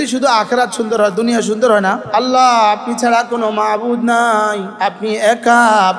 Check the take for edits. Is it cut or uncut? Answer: cut